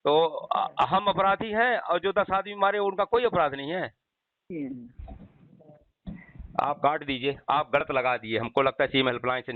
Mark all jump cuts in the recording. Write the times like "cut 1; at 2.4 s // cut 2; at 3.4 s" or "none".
cut 1; at 4.5 s